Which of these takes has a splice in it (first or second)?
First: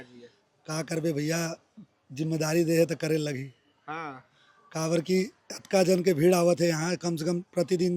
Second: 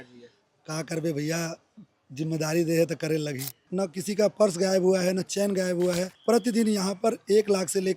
second